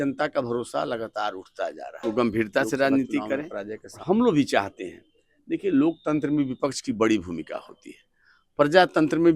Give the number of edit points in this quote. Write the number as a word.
one